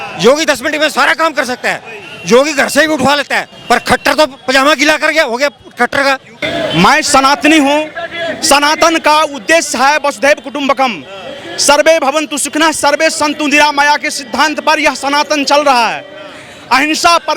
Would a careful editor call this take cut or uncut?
uncut